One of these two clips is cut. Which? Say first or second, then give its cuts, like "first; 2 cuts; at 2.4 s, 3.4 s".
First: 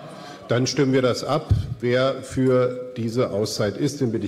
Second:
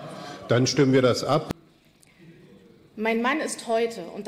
second; 1 cut; at 1.6 s